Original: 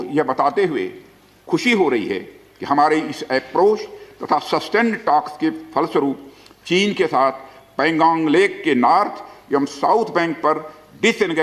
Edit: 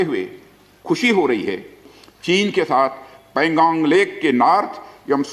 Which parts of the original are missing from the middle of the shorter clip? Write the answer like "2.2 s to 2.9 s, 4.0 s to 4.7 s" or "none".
2.5 s to 6.3 s